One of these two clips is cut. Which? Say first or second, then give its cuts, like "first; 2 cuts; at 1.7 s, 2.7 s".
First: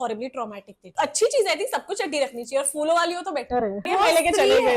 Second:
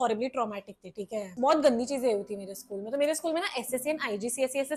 first; 2 cuts; at 0.9 s, 3.9 s